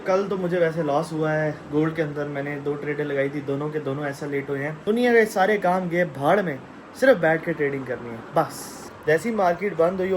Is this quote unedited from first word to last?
no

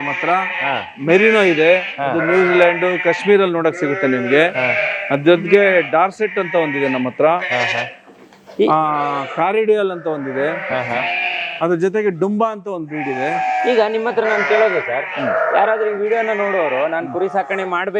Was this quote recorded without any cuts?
yes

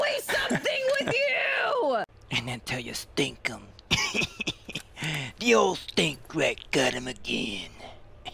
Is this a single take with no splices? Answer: no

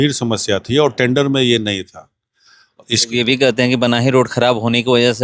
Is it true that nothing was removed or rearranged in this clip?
no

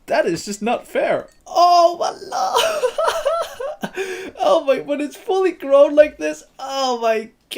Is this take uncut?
no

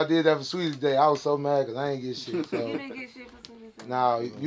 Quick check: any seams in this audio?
no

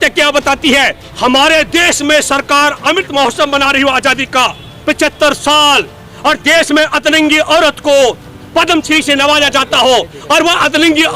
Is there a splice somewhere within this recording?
yes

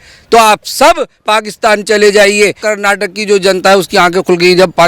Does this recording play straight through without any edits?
no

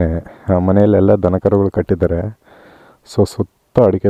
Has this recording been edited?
no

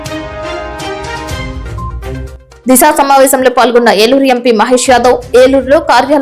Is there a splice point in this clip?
yes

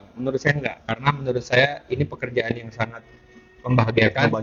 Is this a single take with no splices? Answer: yes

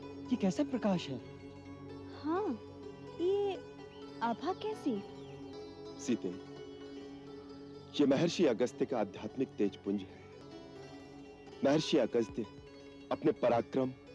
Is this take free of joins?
no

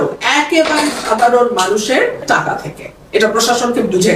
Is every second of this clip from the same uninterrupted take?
no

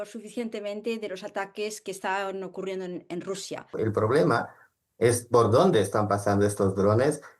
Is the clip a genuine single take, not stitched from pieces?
no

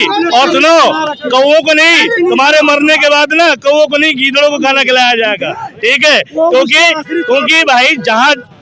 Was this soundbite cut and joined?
no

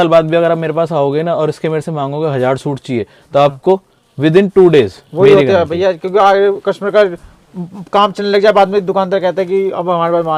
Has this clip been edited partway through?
no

